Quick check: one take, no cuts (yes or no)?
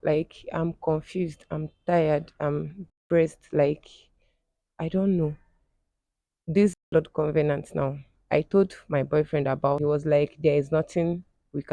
no